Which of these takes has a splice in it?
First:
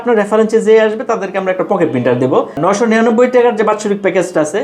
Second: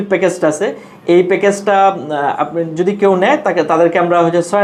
first; 1 cut; at 2.6 s

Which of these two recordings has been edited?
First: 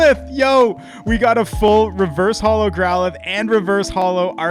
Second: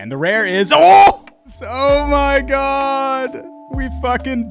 second; 1 cut; at 1.6 s

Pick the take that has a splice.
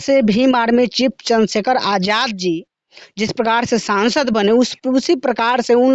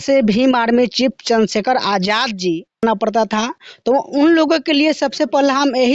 second; 1 cut; at 2.8 s

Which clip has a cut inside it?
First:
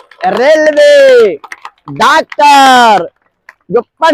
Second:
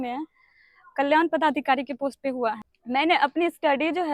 second; 1 cut; at 2.7 s

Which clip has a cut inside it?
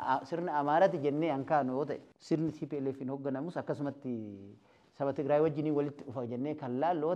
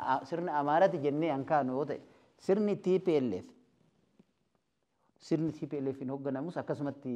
first; 1 cut; at 2.1 s

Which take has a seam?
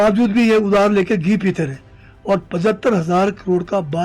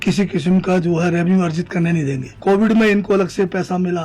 second; 1 cut; at 2.4 s

